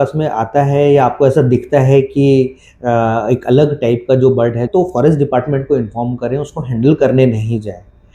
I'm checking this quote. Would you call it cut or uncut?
cut